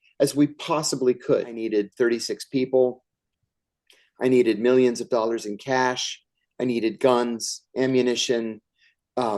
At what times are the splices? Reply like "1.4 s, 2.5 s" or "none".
1.6 s